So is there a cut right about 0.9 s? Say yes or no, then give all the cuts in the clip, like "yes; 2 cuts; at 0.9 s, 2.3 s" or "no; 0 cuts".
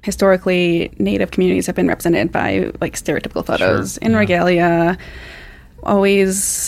yes; 1 cut; at 0.9 s